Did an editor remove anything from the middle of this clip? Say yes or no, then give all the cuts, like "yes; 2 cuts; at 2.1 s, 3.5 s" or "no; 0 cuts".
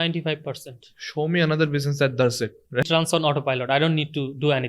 yes; 1 cut; at 2.8 s